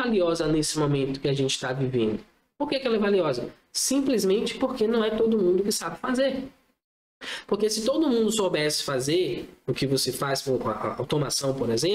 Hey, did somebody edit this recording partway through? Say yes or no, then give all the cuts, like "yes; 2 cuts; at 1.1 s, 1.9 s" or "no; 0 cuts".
no; 0 cuts